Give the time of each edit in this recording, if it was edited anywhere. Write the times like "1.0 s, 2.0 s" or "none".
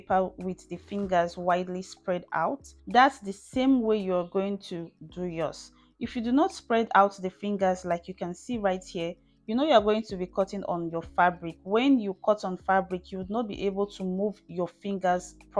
2.7 s